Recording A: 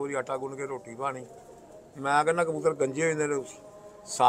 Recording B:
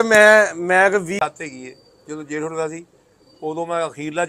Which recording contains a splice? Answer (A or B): B